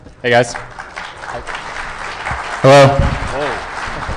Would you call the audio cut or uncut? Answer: uncut